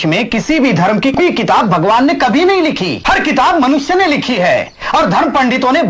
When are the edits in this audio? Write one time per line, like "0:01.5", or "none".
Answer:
0:01.2
0:02.9

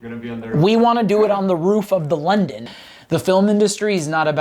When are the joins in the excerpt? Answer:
0:02.7

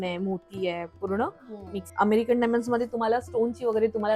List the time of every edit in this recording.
0:01.8

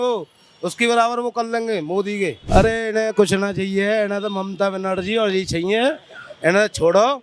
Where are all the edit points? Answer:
0:02.4

